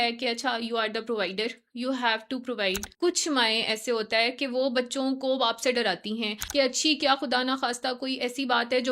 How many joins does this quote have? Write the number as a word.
two